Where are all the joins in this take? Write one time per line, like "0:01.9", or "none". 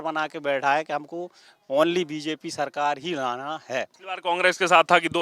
0:04.1